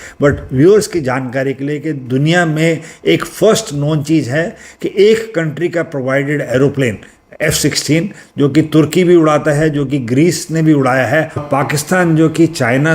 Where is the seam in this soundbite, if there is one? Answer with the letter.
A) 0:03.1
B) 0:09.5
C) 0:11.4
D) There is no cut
C